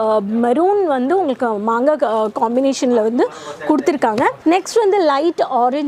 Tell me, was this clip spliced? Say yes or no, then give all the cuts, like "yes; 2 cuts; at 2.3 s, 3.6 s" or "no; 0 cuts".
yes; 1 cut; at 4.4 s